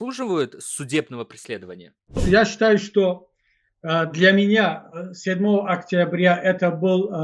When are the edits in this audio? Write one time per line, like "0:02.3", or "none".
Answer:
0:02.2

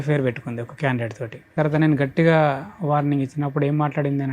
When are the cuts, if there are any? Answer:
0:01.5

